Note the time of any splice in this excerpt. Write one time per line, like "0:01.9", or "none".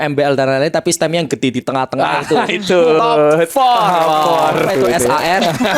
0:04.7